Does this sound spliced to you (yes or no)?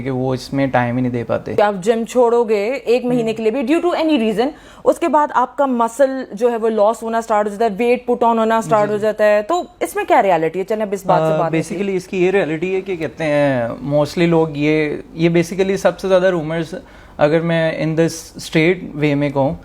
yes